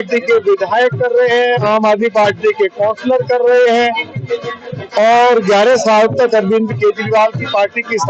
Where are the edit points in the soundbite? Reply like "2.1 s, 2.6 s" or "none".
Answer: none